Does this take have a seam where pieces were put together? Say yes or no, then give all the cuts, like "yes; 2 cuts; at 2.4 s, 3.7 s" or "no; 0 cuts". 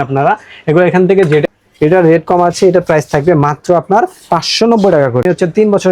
yes; 2 cuts; at 1.5 s, 5.2 s